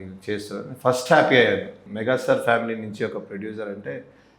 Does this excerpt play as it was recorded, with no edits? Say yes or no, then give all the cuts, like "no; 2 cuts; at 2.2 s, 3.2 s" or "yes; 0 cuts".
no; 1 cut; at 1.8 s